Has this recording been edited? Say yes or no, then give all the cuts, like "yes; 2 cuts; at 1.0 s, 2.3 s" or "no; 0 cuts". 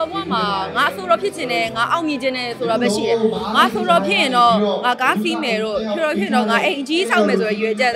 no; 0 cuts